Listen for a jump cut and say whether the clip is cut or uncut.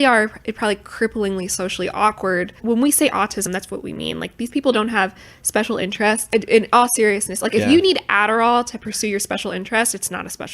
cut